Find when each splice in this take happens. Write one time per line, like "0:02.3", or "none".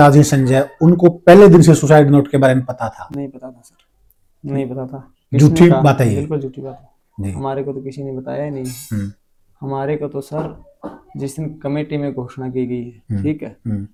none